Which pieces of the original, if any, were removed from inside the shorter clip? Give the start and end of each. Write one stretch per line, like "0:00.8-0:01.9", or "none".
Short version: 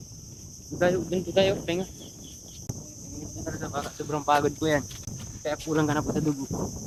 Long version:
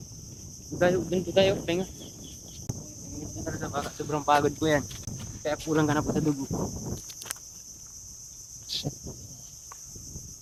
none